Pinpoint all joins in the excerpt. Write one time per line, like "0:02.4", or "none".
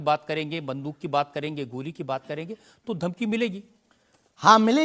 none